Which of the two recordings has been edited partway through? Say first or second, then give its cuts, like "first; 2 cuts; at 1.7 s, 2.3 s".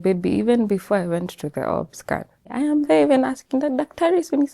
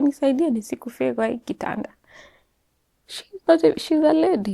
first; 1 cut; at 2.5 s